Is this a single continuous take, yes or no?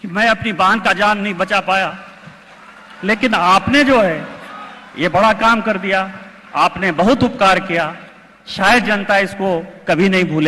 yes